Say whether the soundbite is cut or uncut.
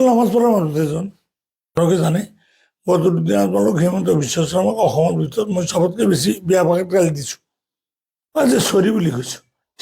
cut